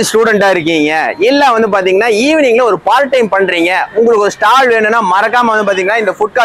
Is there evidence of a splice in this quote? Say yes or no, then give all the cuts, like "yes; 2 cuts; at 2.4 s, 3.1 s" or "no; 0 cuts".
no; 0 cuts